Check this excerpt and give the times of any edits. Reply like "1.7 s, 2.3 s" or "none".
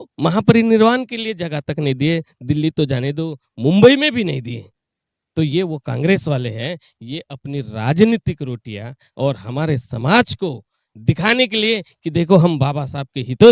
none

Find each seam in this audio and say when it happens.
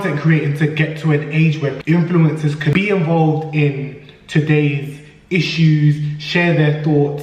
1.8 s, 2.7 s

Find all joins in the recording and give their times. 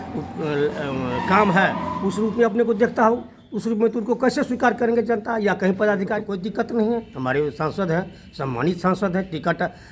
6.3 s

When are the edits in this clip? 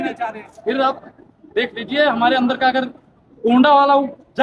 none

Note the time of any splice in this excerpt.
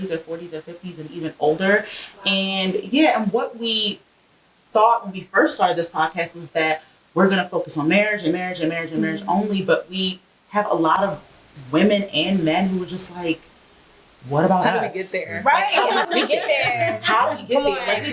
none

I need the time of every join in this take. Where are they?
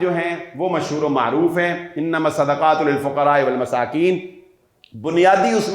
none

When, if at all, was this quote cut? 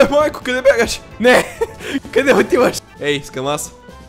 1.0 s, 2.9 s

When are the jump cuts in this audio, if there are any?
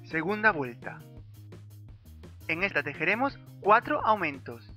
none

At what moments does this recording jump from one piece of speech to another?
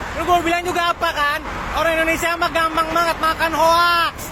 none

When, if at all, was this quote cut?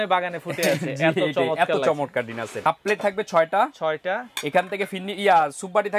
2.6 s

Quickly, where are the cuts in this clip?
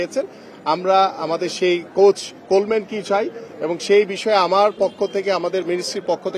none

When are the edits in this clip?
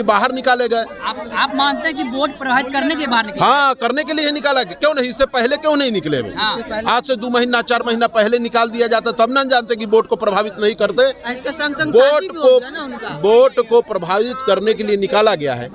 none

